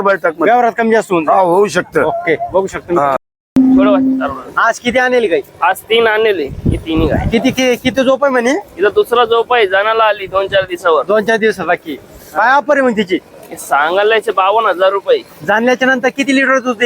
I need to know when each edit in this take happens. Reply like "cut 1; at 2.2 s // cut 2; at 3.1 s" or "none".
cut 1; at 3.4 s